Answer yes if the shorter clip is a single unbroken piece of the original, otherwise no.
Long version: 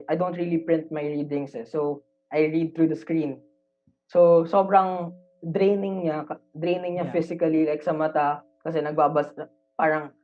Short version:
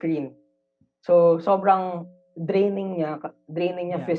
yes